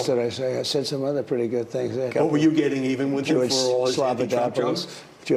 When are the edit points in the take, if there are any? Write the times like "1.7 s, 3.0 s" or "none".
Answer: 2.1 s